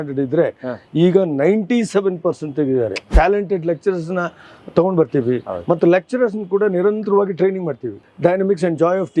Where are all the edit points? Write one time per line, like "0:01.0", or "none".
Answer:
0:03.1
0:08.0